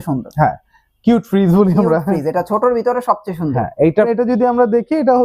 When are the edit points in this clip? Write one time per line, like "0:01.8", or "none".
0:04.1